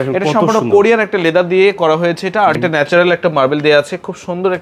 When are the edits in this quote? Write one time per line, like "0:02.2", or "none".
0:02.6